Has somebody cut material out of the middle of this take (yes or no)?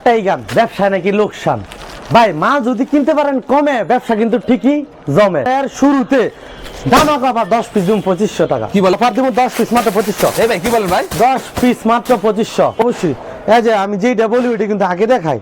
yes